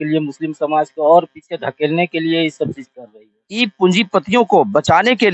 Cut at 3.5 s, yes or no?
yes